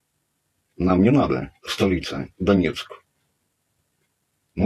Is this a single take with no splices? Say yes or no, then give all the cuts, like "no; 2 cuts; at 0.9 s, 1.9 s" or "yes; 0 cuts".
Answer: yes; 0 cuts